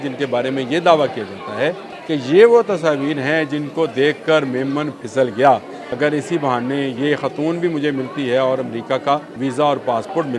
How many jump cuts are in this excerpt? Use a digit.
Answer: 3